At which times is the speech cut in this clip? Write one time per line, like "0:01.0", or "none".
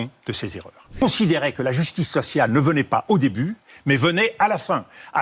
0:01.0